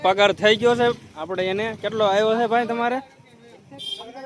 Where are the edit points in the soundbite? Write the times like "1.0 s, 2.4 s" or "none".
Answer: none